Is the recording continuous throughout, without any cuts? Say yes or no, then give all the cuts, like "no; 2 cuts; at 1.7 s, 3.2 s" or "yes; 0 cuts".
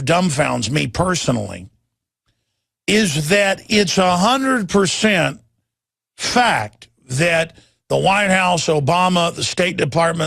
no; 1 cut; at 8.9 s